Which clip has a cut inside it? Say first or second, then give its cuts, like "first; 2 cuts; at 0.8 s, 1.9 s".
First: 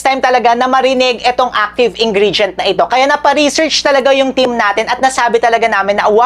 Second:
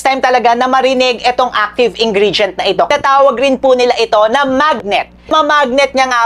second; 2 cuts; at 2.9 s, 5.3 s